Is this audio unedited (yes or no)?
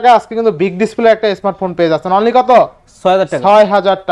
yes